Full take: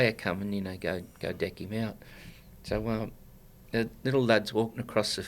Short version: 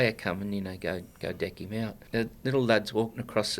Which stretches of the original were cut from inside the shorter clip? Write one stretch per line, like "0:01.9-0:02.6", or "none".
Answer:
0:02.0-0:03.6

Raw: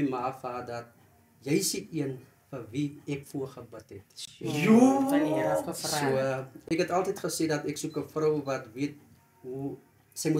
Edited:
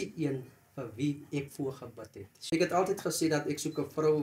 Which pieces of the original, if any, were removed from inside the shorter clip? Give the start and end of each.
0:04.1-0:06.5

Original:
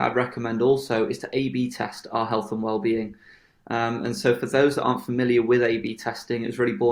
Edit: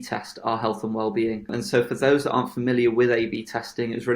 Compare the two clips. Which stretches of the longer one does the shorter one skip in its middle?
0:03.2-0:04.0

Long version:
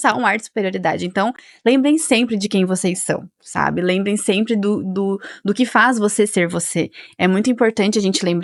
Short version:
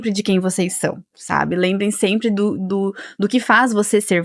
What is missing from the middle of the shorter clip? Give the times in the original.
none

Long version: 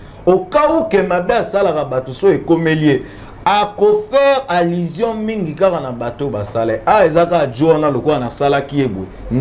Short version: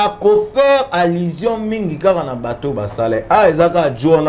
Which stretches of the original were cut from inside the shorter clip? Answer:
none

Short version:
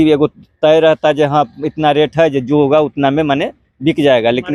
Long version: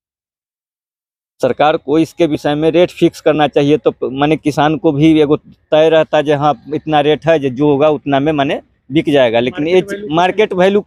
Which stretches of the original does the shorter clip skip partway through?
none

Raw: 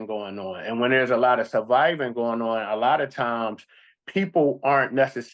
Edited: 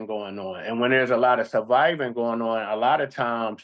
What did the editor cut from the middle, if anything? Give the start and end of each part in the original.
none

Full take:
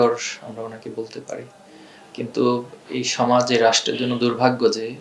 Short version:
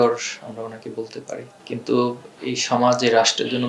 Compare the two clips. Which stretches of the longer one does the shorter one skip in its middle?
0:01.5-0:02.0

